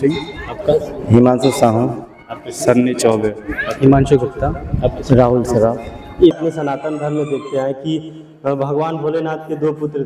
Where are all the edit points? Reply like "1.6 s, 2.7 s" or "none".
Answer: 6.4 s